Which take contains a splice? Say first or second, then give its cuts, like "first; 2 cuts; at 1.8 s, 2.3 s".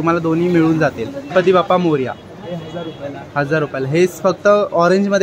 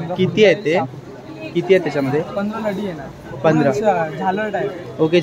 first; 1 cut; at 1.3 s